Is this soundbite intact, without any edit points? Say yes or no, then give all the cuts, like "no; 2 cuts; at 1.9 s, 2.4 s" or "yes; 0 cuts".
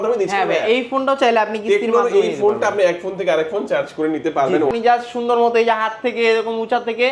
no; 1 cut; at 4.7 s